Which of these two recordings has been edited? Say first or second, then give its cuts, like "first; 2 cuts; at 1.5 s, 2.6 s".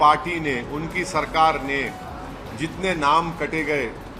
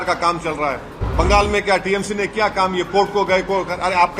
second; 1 cut; at 0.9 s